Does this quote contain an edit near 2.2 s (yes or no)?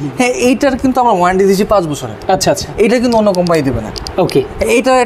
no